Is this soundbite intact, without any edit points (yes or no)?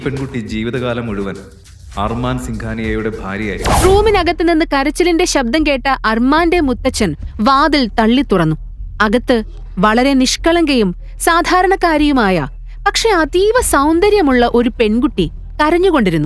no